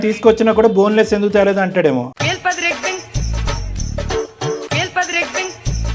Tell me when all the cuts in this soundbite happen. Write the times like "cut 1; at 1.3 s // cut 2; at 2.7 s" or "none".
none